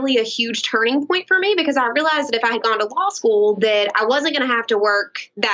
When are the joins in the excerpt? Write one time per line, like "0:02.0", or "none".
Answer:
none

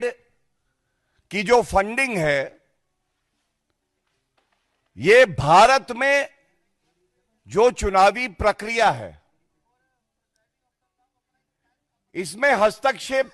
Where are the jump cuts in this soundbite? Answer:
none

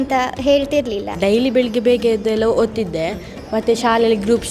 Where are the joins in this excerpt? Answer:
0:01.1

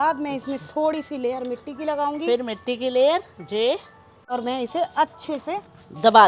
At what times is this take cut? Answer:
0:04.3

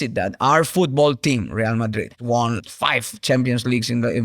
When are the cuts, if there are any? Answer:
0:02.1

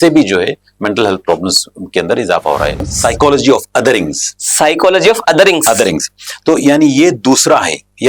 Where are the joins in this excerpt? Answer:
0:02.8

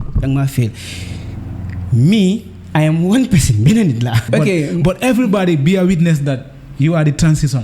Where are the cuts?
0:04.2

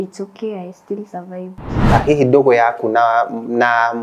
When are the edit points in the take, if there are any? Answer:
0:01.8

